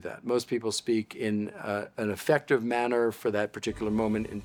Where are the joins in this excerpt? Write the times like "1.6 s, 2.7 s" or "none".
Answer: none